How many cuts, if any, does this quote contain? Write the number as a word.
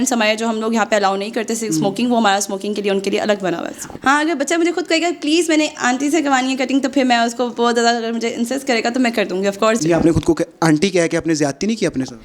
two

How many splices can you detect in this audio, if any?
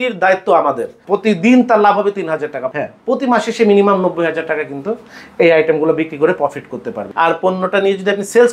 three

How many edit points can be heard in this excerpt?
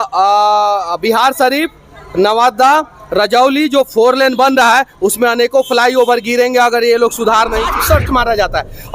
one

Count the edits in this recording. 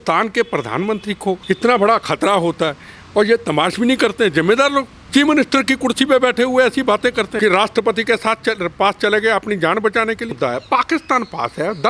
four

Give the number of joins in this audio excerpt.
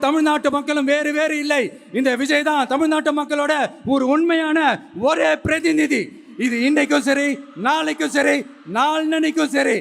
zero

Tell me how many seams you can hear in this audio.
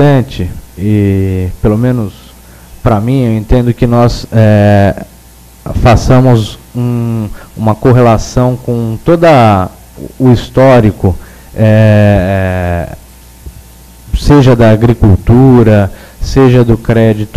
one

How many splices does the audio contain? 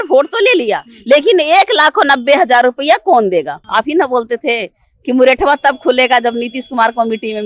one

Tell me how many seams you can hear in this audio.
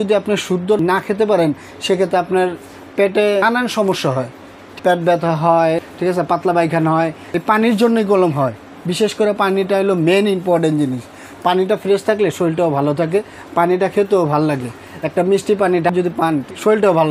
six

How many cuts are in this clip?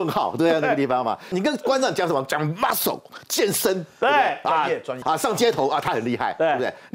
two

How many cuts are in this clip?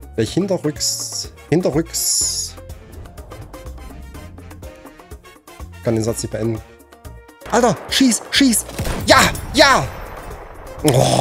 one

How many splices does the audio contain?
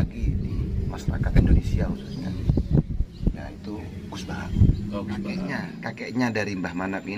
one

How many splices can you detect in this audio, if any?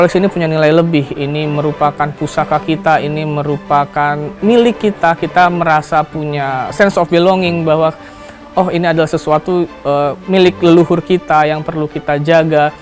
one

